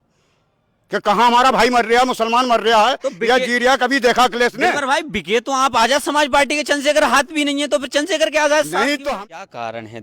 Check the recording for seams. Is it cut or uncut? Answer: cut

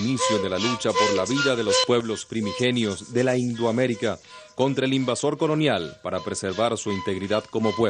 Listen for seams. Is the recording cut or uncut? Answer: uncut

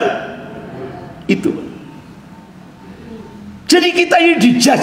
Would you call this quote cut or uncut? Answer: uncut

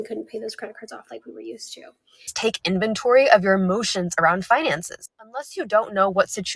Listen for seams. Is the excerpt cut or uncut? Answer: cut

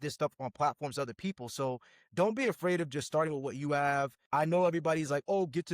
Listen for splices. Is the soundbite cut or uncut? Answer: cut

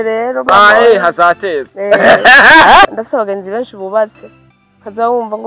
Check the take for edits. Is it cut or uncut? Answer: cut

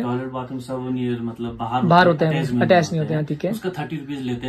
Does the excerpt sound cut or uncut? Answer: uncut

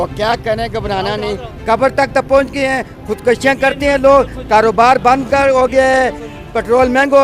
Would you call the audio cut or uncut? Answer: uncut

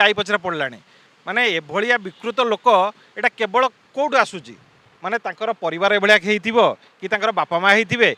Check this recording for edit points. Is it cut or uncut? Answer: uncut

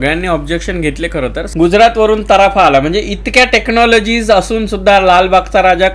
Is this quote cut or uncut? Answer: cut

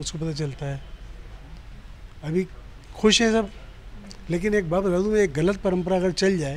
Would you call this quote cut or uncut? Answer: uncut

